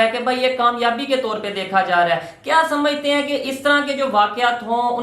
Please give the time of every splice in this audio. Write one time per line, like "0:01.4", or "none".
none